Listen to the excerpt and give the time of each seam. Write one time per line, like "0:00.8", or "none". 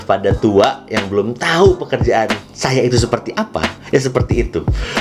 none